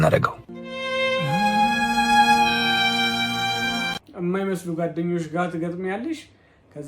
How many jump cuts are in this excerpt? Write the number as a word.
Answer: one